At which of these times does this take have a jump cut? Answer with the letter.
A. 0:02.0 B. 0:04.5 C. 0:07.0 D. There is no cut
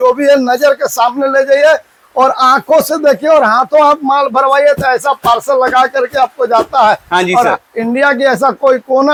D